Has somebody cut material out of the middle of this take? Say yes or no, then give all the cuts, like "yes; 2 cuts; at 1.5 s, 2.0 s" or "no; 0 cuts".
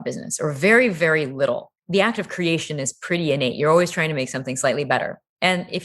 yes; 1 cut; at 1.7 s